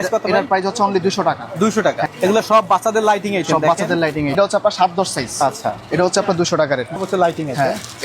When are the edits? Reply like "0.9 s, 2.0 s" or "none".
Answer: 2.1 s, 4.4 s, 7.0 s